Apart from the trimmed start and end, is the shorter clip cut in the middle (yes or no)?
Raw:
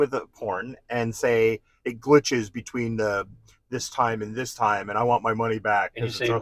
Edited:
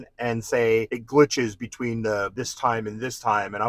yes